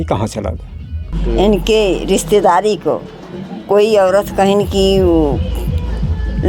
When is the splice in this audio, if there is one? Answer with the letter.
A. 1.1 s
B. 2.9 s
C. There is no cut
A